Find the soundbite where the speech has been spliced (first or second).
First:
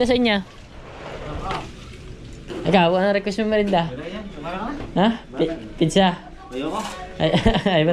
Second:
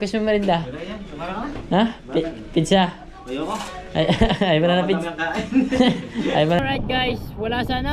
second